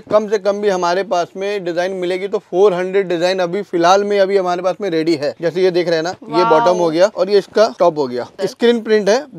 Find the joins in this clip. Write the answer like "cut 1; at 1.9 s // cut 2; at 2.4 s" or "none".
none